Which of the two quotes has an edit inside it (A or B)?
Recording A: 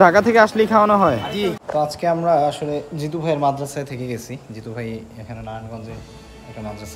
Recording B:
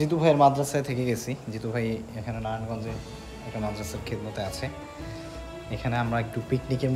A